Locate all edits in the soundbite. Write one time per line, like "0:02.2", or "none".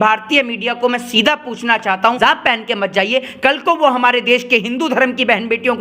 0:02.2